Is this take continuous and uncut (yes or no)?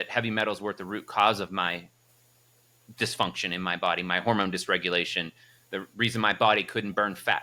yes